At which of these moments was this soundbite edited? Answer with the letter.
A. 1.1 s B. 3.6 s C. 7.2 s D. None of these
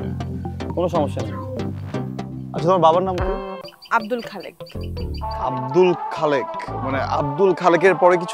B